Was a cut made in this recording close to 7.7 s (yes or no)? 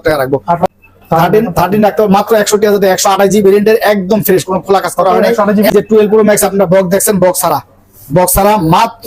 no